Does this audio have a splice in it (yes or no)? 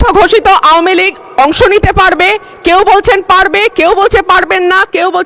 no